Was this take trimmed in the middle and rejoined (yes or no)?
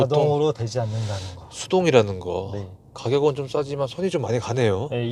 no